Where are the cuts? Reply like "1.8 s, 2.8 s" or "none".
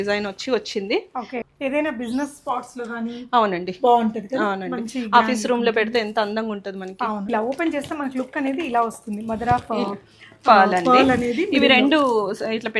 1.4 s, 7.2 s